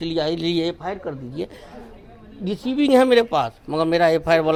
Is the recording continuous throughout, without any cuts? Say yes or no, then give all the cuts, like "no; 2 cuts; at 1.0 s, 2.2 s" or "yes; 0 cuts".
yes; 0 cuts